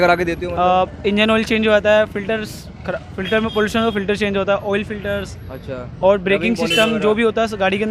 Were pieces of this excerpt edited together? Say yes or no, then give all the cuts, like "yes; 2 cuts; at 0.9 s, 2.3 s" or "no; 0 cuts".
no; 0 cuts